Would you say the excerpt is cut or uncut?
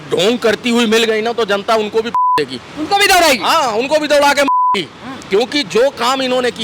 uncut